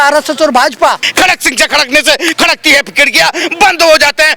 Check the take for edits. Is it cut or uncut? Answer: cut